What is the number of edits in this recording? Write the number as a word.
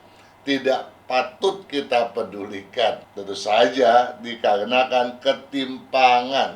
one